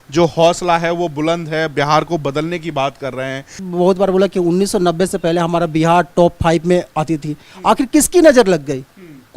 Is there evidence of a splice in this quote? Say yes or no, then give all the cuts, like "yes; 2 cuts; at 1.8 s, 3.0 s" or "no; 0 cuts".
yes; 1 cut; at 3.6 s